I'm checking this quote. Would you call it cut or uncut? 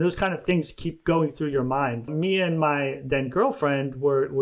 cut